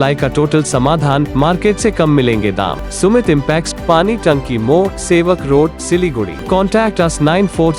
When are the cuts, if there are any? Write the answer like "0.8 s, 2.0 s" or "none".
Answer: 2.8 s, 6.4 s